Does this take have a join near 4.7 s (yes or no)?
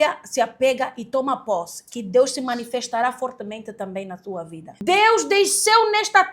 yes